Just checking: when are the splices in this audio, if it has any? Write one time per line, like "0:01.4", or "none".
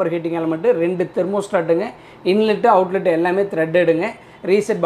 none